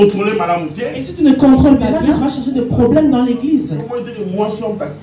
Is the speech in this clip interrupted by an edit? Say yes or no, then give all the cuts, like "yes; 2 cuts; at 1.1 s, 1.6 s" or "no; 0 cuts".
yes; 1 cut; at 1.9 s